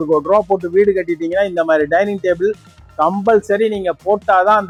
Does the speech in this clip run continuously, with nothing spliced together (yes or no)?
yes